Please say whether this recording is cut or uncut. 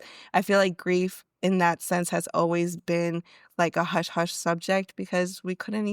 uncut